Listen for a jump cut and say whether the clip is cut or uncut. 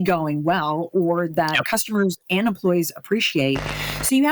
uncut